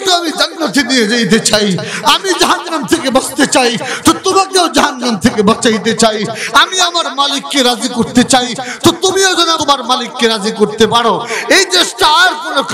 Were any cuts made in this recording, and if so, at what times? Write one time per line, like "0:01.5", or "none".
0:09.5